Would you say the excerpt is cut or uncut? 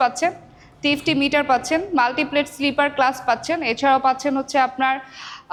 uncut